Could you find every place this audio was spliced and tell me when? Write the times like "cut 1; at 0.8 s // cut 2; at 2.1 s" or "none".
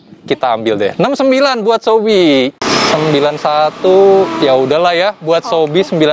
cut 1; at 2.6 s